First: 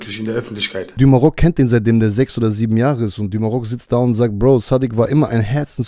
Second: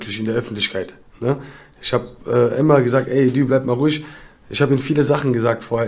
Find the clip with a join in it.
first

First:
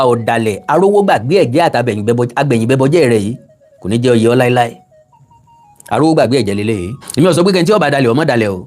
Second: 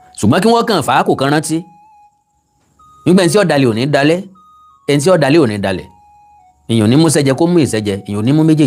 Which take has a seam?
first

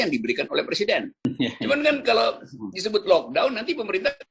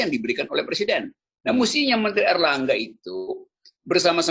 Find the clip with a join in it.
first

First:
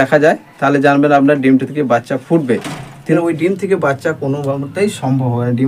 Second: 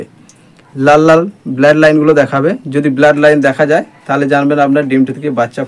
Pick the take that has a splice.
first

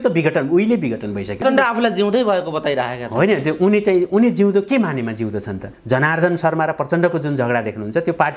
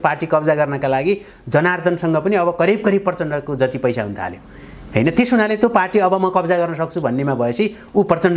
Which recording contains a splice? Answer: first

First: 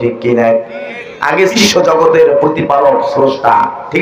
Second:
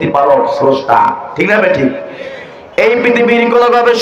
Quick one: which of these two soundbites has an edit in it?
first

